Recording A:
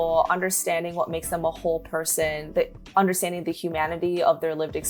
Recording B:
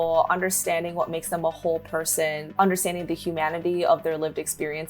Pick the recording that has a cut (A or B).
B